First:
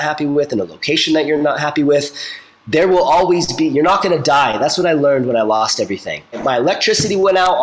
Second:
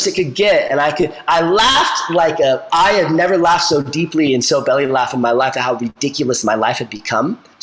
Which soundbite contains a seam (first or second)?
first